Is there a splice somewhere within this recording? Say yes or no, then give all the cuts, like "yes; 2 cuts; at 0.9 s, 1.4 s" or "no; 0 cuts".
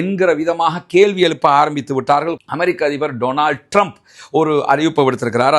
yes; 1 cut; at 2.3 s